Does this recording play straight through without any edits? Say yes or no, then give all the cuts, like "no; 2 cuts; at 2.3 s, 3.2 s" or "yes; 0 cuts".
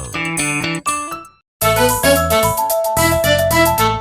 no; 1 cut; at 1.5 s